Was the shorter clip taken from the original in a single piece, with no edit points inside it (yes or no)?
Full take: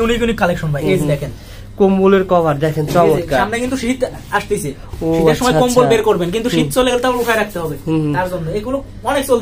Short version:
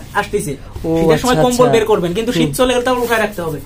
yes